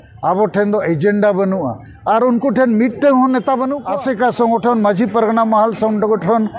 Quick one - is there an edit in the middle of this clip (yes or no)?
yes